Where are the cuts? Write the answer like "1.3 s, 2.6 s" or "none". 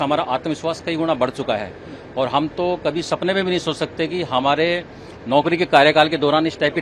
none